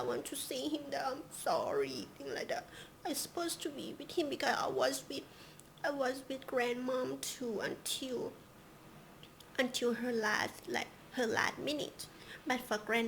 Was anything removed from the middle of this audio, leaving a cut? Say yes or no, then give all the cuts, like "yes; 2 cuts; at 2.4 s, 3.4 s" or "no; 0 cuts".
no; 0 cuts